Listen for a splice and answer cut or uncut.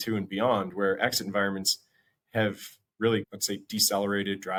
uncut